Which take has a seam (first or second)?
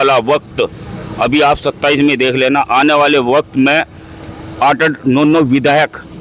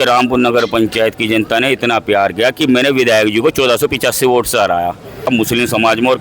second